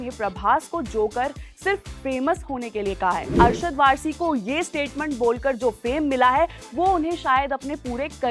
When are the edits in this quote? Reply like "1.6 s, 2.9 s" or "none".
3.3 s